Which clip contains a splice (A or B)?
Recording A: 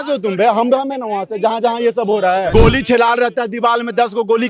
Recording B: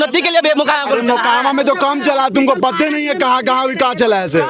A